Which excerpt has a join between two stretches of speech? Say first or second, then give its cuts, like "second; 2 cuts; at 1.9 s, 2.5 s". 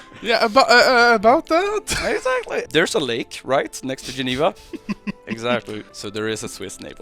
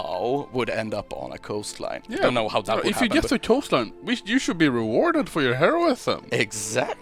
first; 2 cuts; at 2.6 s, 5.9 s